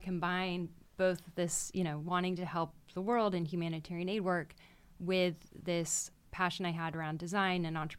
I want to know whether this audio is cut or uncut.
cut